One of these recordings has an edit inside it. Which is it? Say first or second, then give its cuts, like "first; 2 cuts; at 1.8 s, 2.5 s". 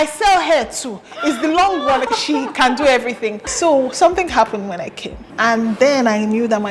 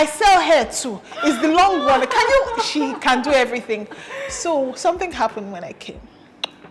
first; 3 cuts; at 2.1 s, 3.5 s, 5.3 s